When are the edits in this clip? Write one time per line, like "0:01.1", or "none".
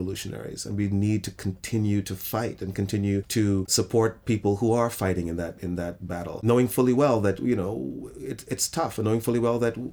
0:03.6
0:06.4